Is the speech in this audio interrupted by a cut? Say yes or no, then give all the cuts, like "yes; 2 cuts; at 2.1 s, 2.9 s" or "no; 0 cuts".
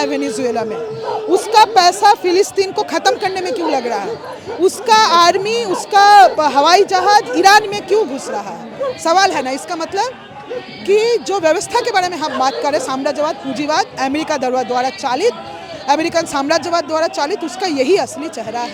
no; 0 cuts